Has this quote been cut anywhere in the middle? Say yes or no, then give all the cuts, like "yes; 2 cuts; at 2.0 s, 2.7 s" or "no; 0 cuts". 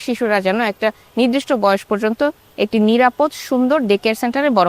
no; 0 cuts